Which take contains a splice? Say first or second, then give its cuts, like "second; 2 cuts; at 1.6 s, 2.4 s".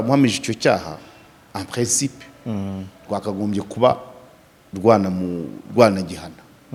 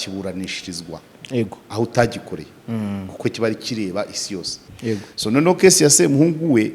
second; 1 cut; at 4.6 s